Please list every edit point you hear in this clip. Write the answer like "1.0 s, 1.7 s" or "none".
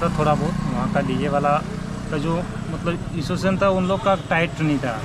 none